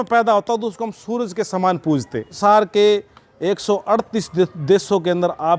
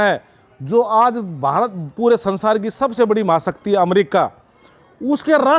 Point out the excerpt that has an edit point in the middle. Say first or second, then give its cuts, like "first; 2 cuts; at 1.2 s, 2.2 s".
first; 1 cut; at 2.3 s